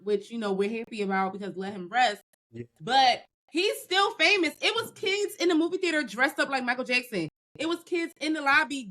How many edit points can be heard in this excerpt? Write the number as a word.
one